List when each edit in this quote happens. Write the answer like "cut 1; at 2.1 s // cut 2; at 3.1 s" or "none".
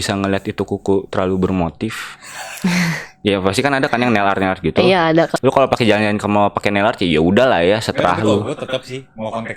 cut 1; at 5.3 s